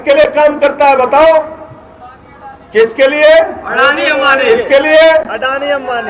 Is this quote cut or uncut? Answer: uncut